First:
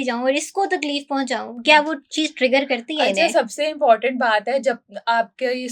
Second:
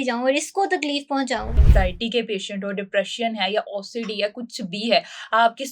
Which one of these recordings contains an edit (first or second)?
second